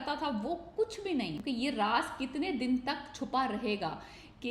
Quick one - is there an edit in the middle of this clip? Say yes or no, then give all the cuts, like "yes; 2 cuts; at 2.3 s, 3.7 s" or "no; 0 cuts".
yes; 1 cut; at 1.4 s